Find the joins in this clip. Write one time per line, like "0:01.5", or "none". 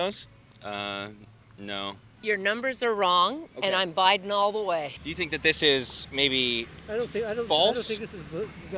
0:02.1
0:05.0